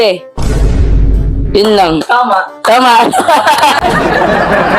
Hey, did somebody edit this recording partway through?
yes; 1 cut; at 3.8 s

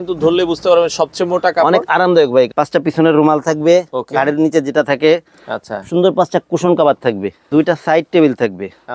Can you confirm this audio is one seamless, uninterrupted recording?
no; 2 cuts; at 2.5 s, 7.5 s

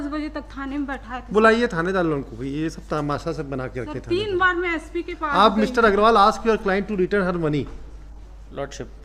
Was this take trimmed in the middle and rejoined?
no; 0 cuts

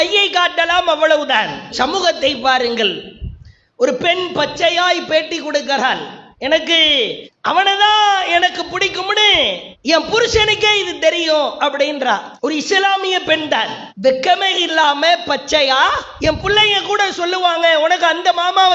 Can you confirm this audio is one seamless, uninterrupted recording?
yes; 0 cuts

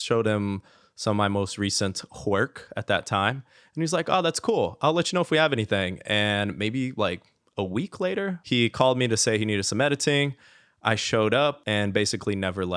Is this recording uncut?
no; 2 cuts; at 8.4 s, 11.6 s

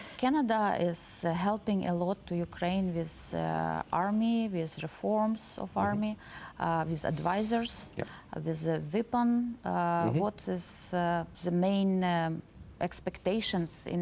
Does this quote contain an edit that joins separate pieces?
no; 0 cuts

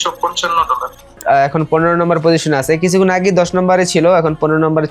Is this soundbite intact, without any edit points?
no; 1 cut; at 1.2 s

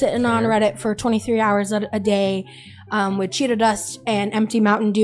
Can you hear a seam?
no; 0 cuts

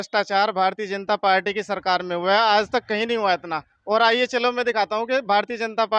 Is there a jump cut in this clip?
no; 0 cuts

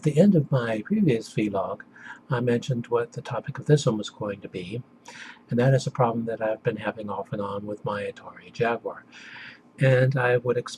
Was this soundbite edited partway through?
no; 0 cuts

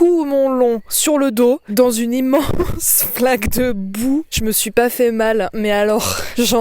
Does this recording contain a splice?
no; 0 cuts

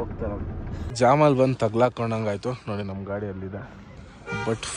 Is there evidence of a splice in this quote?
yes; 1 cut; at 0.9 s

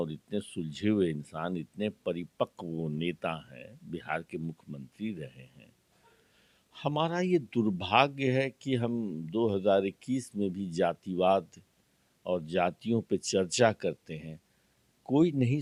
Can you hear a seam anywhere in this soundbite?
no; 0 cuts

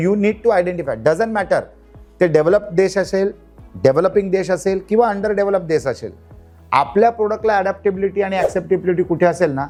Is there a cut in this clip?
no; 0 cuts

